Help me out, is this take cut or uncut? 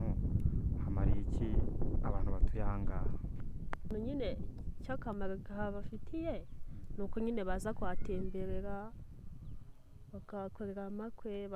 cut